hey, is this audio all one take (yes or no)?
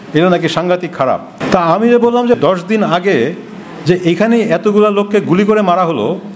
no